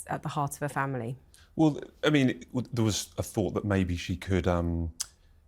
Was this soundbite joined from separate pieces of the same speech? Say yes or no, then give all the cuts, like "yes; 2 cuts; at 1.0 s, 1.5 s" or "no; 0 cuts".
no; 0 cuts